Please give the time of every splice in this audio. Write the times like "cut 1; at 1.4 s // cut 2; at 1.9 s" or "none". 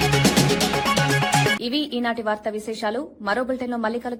none